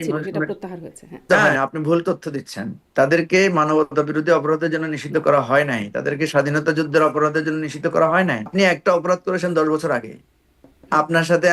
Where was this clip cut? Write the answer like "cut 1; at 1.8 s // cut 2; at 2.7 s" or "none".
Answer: cut 1; at 1.3 s // cut 2; at 8.5 s